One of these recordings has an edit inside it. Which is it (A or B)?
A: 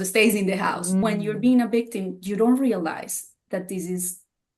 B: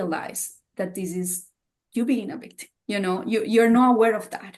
A